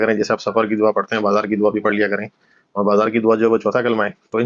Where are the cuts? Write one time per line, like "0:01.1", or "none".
none